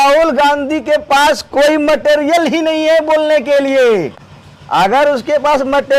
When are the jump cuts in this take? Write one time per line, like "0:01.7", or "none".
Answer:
none